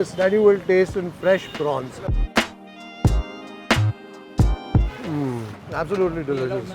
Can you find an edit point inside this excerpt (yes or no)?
yes